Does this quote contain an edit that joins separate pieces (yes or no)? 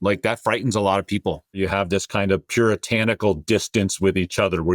yes